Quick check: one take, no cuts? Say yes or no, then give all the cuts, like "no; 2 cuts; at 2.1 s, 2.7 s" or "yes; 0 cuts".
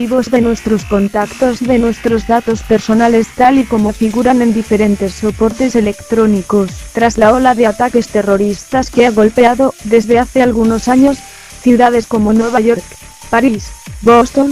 yes; 0 cuts